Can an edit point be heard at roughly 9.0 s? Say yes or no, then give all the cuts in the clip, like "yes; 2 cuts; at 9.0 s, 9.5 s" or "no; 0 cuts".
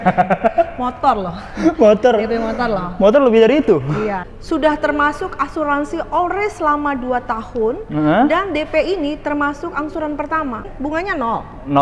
no; 2 cuts; at 4.2 s, 10.7 s